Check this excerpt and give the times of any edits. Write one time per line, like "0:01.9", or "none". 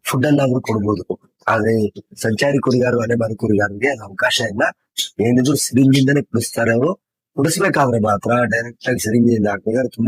none